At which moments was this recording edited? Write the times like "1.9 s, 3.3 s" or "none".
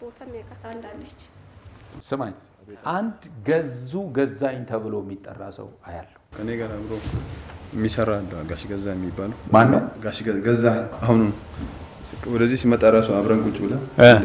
1.9 s, 10.9 s